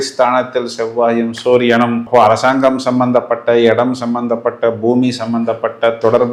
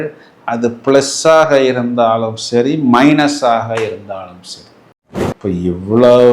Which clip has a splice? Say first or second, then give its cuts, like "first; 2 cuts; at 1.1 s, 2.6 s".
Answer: second; 1 cut; at 4.9 s